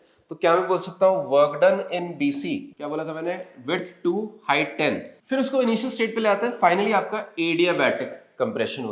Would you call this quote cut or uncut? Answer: cut